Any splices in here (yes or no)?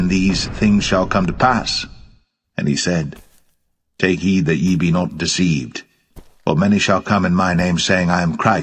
yes